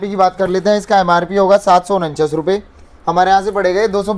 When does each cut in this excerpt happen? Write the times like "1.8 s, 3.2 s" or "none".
none